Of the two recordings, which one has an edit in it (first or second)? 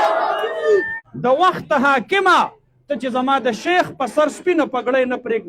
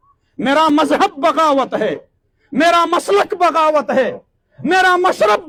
first